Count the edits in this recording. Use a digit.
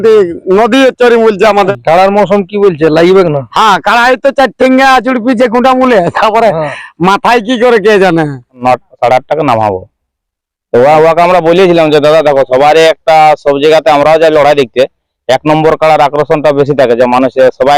2